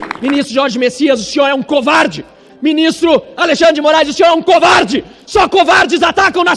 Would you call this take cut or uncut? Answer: uncut